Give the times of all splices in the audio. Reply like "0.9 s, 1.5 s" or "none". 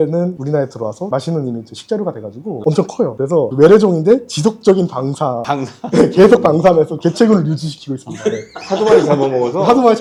none